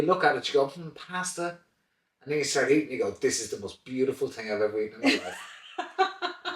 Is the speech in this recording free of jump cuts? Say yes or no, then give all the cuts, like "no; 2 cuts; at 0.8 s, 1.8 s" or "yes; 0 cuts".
yes; 0 cuts